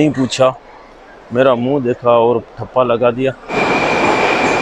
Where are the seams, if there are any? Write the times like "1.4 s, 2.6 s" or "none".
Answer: 3.5 s